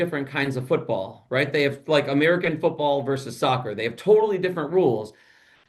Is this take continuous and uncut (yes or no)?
yes